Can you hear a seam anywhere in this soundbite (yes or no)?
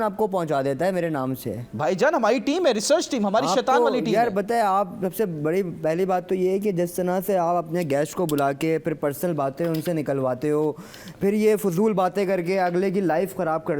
no